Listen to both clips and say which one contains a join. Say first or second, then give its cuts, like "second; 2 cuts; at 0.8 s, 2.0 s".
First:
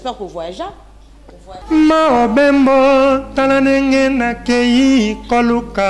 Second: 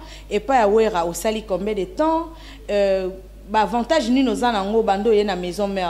first; 1 cut; at 1.6 s